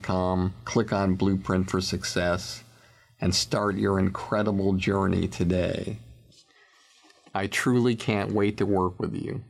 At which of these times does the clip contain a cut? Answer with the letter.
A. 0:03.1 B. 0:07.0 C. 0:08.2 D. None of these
D